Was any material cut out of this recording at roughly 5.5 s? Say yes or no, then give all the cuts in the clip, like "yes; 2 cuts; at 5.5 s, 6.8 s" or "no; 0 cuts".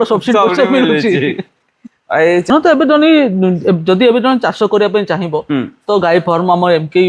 no; 1 cut; at 2.5 s